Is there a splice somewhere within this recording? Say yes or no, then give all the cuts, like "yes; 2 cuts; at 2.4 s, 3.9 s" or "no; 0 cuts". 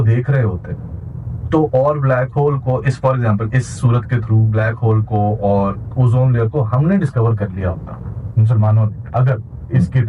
no; 0 cuts